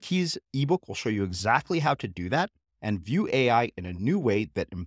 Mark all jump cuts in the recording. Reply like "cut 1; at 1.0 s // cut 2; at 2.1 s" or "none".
none